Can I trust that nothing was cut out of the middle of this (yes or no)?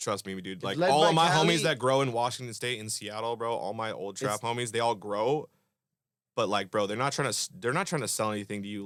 yes